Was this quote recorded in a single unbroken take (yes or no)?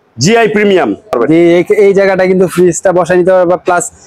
no